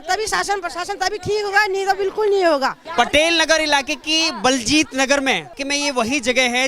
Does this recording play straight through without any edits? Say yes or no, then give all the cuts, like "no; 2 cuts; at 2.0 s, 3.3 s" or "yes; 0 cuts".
no; 2 cuts; at 2.8 s, 5.6 s